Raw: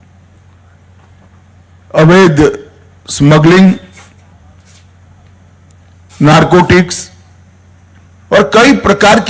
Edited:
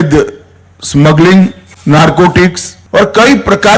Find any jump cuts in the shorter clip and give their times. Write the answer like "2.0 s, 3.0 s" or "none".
1.7 s, 2.7 s